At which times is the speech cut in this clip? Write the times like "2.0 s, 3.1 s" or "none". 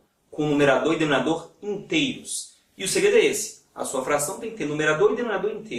2.1 s